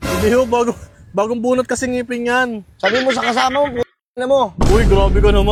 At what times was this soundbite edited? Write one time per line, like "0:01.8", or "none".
none